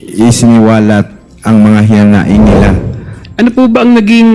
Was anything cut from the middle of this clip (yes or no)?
yes